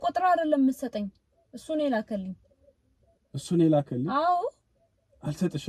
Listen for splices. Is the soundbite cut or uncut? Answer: uncut